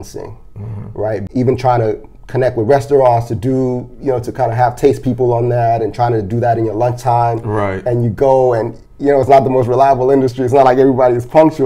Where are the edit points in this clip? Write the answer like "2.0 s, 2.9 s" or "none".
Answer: 1.3 s